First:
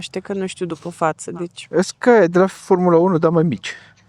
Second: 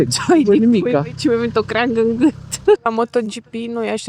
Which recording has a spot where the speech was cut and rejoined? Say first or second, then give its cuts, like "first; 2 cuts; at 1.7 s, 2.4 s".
second; 1 cut; at 2.8 s